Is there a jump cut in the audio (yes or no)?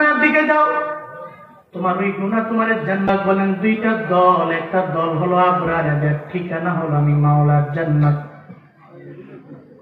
yes